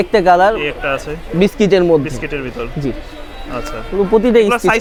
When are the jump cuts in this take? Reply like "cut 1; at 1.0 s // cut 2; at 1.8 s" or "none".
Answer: none